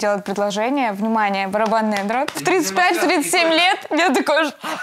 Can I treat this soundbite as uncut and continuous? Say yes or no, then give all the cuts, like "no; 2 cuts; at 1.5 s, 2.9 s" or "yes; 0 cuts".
no; 1 cut; at 2.4 s